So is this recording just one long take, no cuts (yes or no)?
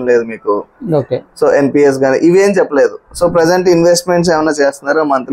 yes